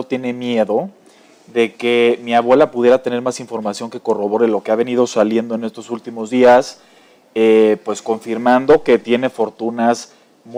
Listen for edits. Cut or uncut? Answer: uncut